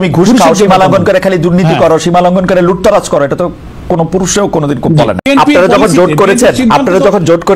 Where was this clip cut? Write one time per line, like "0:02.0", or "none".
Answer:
0:05.3

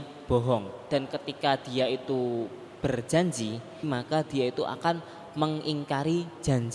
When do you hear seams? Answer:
0:00.8
0:03.9

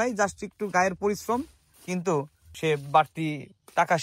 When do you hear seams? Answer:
0:01.8
0:02.5

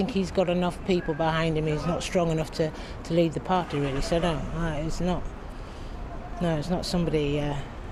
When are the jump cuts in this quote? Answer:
none

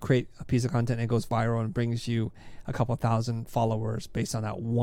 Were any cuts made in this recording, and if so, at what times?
none

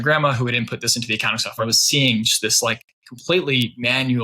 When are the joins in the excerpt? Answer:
0:01.6

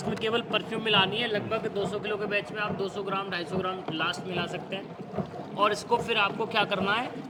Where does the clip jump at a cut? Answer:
none

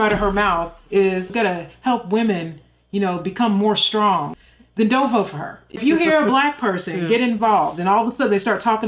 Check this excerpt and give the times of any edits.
0:01.3
0:04.3

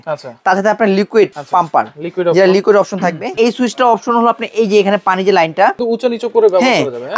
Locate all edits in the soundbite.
0:01.4
0:03.3
0:05.8

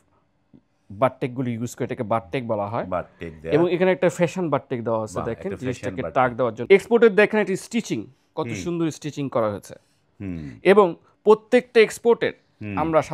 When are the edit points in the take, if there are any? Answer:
0:06.6

